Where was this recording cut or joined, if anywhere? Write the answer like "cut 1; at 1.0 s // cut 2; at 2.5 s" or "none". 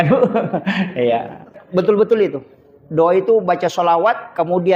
cut 1; at 1.5 s